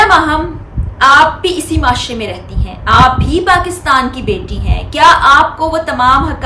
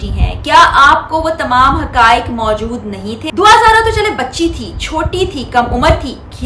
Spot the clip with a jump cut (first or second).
second